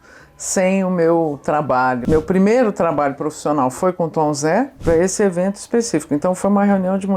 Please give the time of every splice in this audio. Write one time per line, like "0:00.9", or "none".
0:02.0
0:04.7